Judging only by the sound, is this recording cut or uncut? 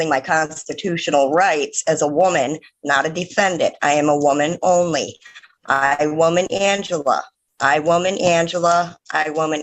uncut